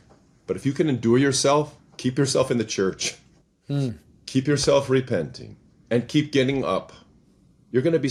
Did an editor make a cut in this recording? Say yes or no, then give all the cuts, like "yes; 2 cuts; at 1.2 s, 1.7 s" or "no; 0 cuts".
no; 0 cuts